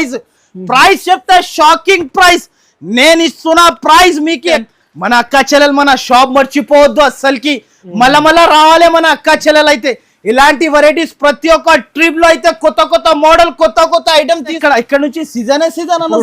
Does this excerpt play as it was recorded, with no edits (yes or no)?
no